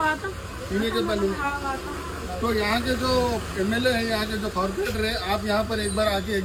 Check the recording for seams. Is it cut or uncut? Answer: uncut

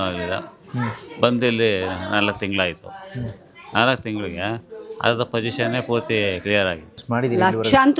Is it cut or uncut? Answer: cut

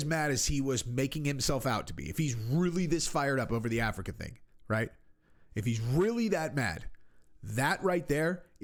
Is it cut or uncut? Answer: uncut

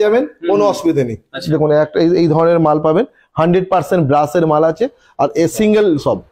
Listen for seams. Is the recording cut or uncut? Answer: cut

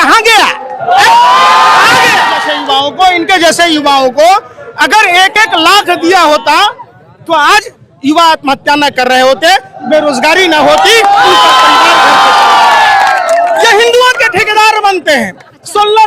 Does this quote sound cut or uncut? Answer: cut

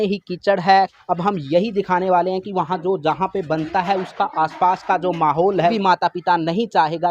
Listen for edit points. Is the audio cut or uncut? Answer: cut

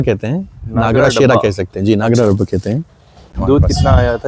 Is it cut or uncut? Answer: cut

